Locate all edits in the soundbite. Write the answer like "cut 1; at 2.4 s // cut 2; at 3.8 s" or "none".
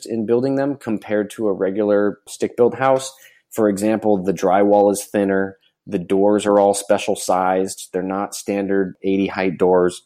none